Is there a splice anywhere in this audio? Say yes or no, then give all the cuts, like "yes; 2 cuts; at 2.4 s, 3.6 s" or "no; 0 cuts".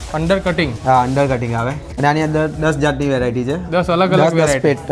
yes; 1 cut; at 1.8 s